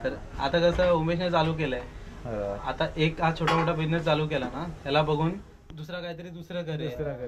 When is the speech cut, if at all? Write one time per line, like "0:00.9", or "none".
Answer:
none